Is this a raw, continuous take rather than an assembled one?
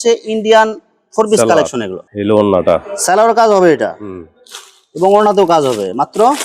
yes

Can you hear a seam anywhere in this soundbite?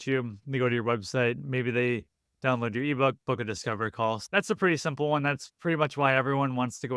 no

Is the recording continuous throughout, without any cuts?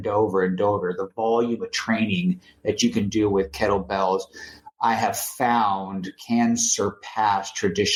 yes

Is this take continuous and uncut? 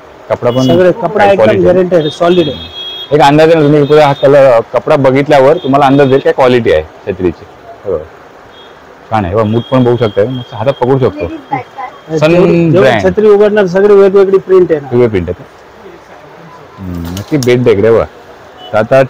yes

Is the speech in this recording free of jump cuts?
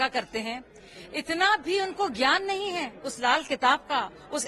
yes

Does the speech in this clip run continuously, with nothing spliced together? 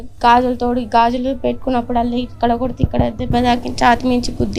yes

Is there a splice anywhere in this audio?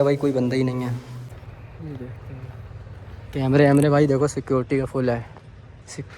yes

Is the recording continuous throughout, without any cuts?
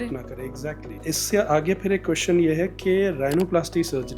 no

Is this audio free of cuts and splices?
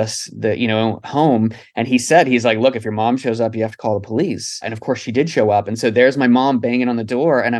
no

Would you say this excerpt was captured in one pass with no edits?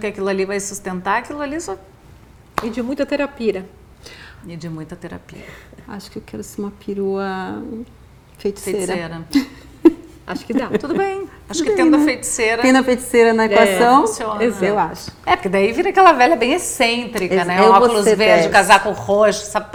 yes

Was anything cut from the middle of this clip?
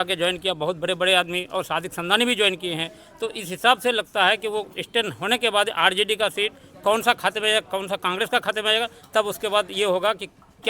no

